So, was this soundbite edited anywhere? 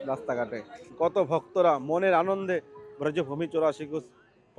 yes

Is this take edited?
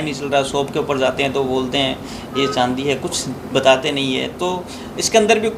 no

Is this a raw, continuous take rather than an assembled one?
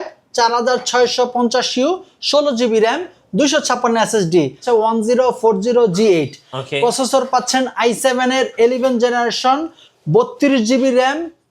no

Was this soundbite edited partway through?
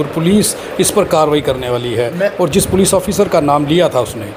no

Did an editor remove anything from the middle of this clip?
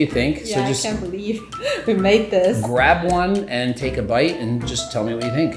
no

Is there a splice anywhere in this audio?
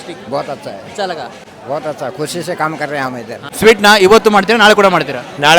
yes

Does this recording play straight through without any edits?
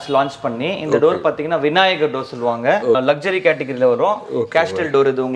no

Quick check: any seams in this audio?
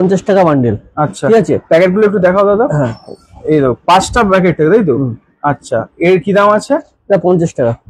no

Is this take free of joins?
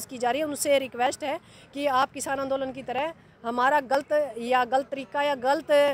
yes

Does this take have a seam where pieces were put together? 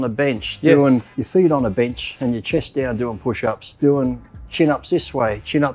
yes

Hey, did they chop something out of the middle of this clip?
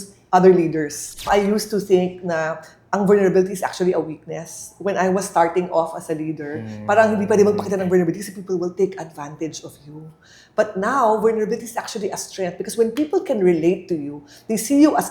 yes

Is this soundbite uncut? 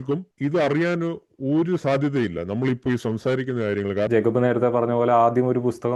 no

